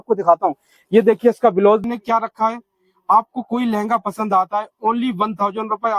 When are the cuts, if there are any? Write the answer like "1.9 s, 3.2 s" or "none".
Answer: 1.8 s